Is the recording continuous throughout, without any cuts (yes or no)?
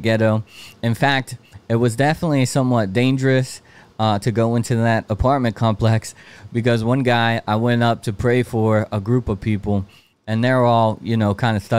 yes